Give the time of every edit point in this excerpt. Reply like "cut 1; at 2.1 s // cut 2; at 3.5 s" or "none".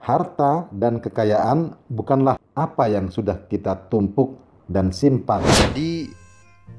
cut 1; at 5.5 s